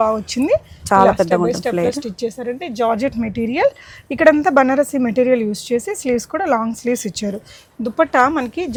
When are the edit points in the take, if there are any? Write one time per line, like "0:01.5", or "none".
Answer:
none